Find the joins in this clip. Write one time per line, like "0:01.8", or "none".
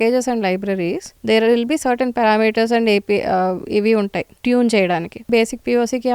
0:01.1
0:04.3
0:05.3